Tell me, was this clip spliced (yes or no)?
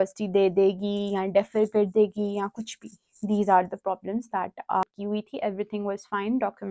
yes